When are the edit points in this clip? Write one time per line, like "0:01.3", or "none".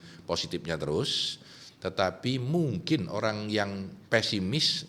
0:03.9